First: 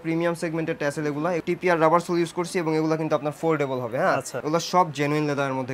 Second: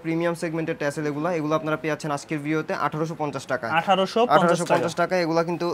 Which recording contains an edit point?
first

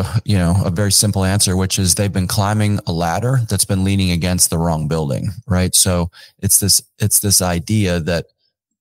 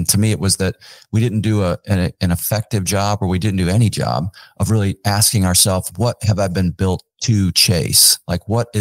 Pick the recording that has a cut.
second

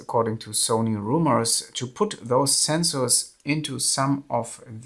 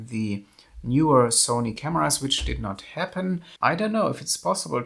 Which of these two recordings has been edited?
second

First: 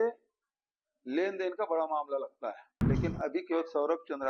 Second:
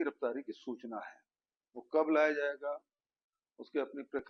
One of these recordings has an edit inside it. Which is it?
first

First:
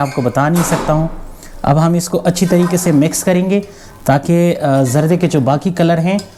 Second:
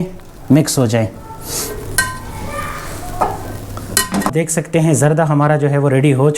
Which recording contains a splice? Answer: second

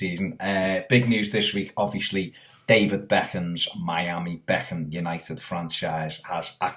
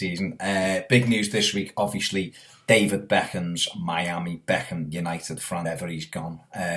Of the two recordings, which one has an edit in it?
first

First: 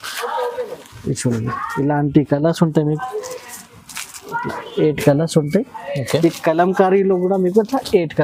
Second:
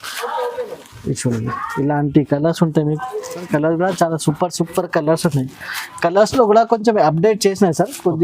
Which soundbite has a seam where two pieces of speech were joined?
second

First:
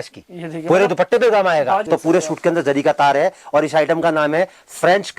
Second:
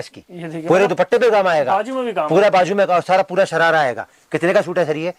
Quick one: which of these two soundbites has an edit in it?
first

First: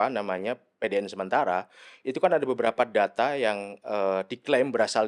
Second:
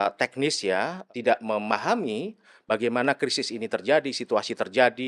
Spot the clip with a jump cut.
second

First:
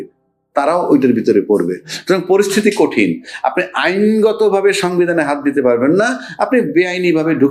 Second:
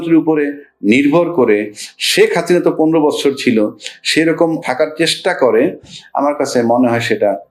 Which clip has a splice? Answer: second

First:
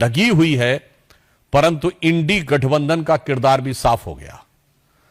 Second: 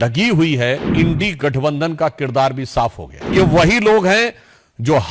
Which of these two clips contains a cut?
second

